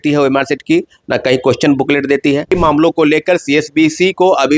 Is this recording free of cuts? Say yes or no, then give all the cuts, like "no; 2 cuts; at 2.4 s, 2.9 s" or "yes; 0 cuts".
no; 1 cut; at 2.5 s